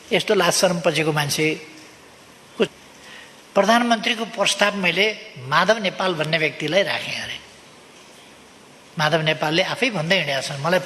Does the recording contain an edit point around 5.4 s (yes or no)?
no